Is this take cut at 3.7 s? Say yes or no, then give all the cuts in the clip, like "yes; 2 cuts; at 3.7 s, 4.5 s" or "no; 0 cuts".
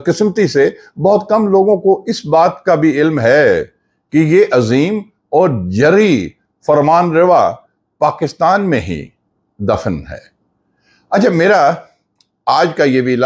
no; 0 cuts